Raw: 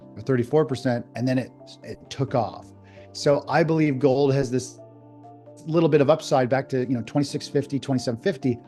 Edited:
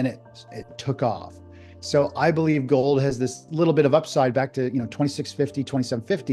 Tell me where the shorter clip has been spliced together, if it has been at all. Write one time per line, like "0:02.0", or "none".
0:03.4